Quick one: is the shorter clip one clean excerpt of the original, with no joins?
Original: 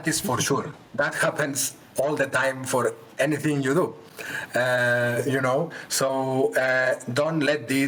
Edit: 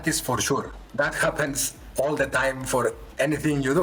yes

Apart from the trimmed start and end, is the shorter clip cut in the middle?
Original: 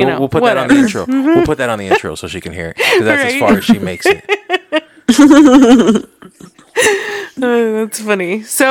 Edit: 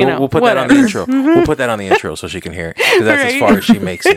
no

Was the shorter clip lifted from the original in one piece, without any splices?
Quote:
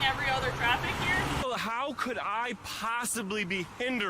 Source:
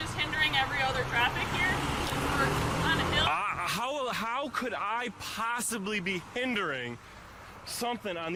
no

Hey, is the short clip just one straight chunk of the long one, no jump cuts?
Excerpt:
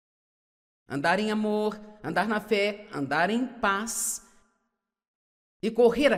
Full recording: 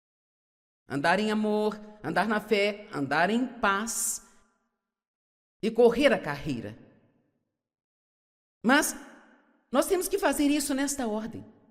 yes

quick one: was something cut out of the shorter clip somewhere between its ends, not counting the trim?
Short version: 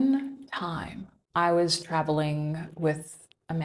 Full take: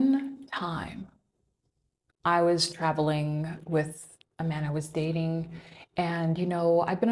yes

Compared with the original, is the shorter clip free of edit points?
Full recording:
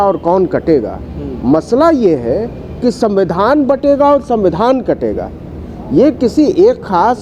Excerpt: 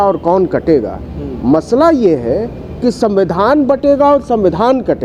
yes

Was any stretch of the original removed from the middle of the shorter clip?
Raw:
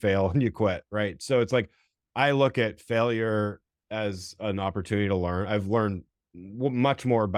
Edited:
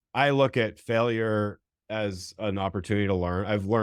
no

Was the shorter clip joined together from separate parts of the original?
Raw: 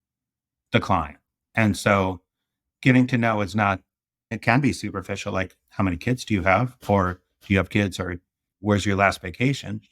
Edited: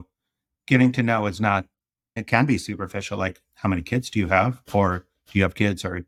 no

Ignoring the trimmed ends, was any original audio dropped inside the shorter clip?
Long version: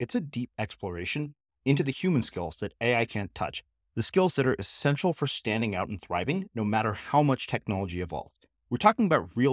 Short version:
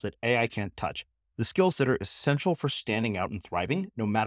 no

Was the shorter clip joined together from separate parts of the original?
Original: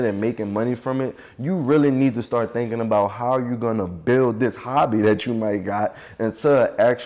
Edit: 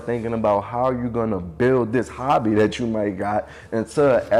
no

